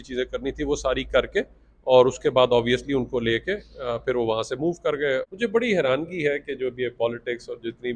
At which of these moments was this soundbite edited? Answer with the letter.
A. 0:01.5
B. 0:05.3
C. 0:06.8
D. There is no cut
B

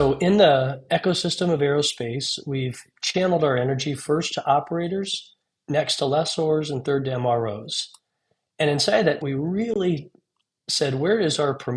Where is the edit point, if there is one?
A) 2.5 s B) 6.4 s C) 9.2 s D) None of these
C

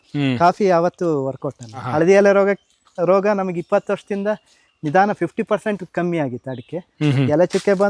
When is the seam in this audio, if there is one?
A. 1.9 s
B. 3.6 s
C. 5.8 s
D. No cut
A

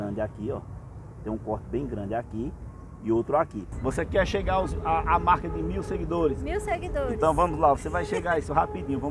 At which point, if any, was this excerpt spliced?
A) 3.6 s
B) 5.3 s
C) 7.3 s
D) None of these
A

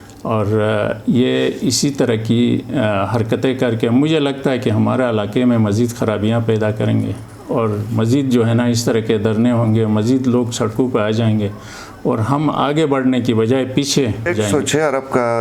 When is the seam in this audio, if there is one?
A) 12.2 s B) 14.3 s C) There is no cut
B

